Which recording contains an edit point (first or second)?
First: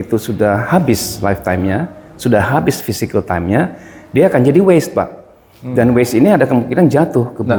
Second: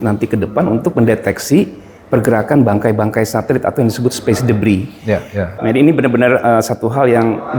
second